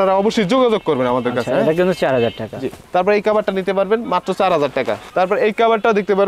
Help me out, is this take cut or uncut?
uncut